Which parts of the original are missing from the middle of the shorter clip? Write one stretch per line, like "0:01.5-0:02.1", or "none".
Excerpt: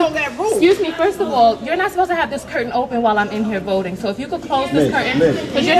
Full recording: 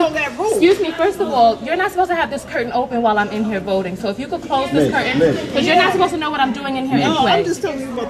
none